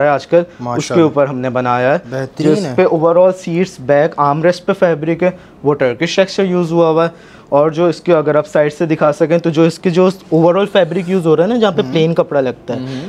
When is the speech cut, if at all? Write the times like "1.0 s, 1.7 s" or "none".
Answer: none